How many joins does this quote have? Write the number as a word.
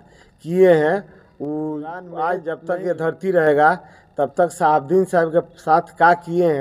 one